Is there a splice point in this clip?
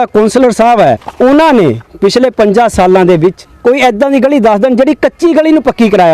yes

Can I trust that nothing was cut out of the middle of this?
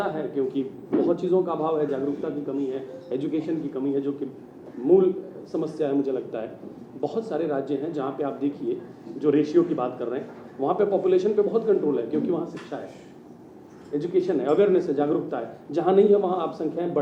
yes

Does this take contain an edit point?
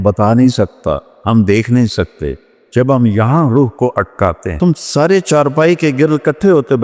yes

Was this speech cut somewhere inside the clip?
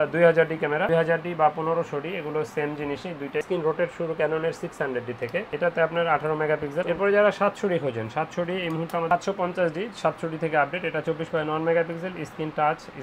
yes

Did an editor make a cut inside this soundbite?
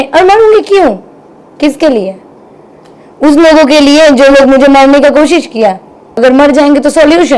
yes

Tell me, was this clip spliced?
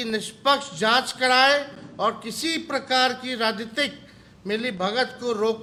no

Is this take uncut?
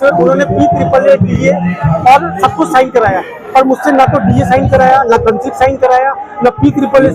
yes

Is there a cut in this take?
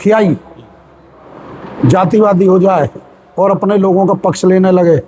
no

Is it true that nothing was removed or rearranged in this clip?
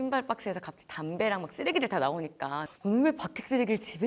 no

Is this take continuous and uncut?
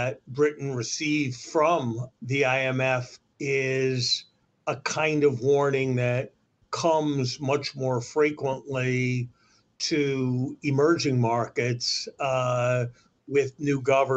no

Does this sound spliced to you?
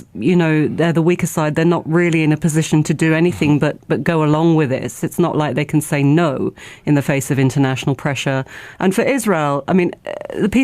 yes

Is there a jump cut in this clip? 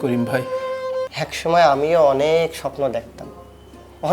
yes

